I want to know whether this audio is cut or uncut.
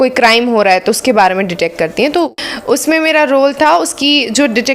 cut